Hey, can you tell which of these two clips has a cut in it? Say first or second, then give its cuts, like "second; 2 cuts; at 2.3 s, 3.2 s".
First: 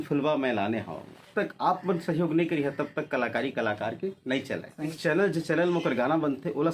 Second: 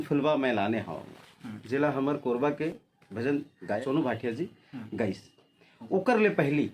first; 2 cuts; at 1.3 s, 4.9 s